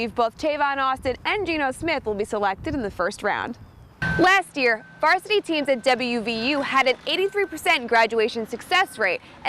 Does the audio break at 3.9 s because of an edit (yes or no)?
yes